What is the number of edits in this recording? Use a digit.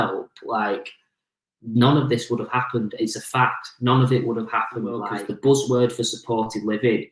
1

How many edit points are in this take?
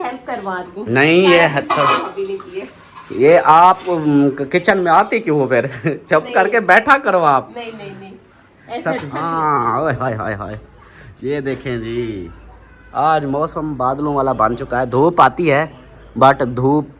1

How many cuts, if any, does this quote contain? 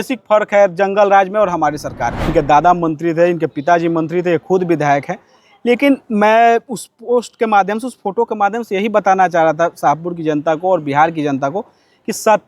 1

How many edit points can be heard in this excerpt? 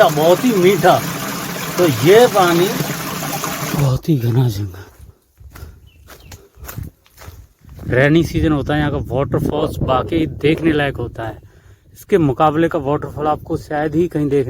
2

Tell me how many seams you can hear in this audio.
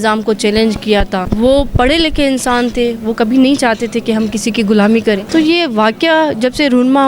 2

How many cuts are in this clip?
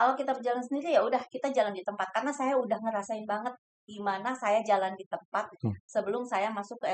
0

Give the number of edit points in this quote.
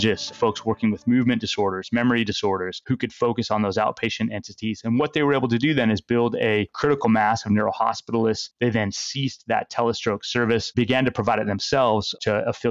0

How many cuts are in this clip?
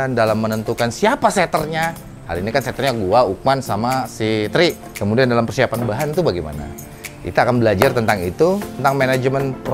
2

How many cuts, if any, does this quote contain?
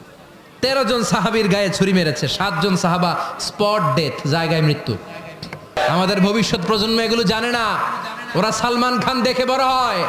1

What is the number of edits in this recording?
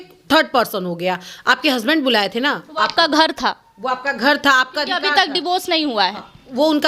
0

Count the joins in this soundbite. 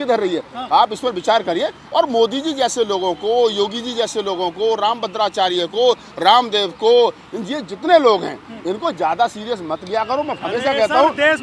0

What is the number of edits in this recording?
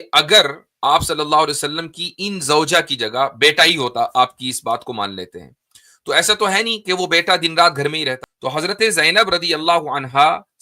1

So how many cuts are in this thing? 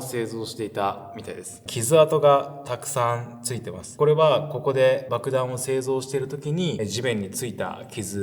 4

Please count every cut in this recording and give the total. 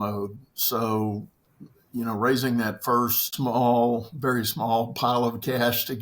1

